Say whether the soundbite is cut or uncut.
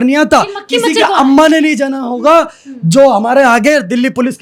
uncut